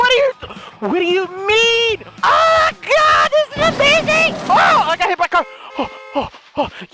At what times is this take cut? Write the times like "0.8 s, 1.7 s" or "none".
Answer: 2.1 s

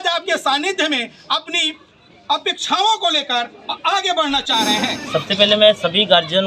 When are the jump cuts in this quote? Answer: 5.0 s

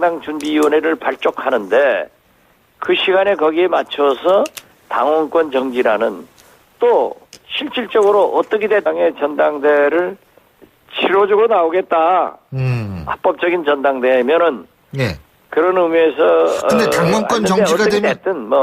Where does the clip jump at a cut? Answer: none

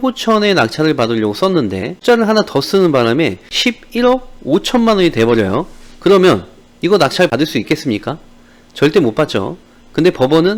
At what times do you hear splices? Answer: none

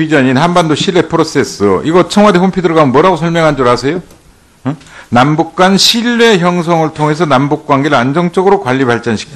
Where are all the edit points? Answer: none

